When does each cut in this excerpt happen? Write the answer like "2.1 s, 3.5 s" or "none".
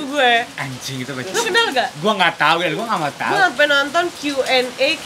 none